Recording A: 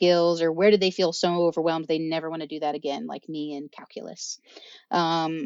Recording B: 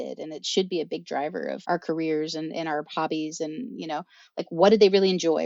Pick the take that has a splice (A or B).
B